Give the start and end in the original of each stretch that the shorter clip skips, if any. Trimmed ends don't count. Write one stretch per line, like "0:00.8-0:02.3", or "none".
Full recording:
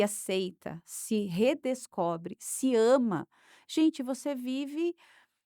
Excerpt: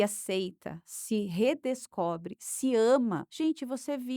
0:03.3-0:03.7